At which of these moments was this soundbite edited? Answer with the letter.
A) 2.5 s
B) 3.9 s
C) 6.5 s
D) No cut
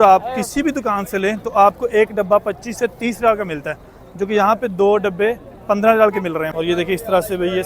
C